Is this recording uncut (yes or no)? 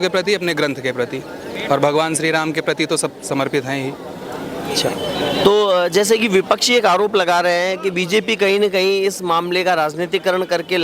yes